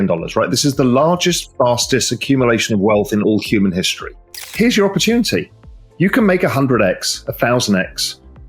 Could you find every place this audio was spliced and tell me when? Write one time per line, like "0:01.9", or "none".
0:04.4